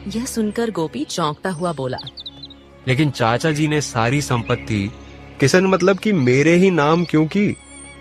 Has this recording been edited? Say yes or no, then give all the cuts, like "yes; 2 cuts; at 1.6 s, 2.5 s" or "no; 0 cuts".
no; 0 cuts